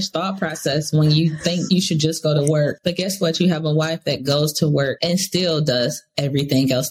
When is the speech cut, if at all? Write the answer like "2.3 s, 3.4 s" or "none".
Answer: 1.7 s, 2.8 s, 5.0 s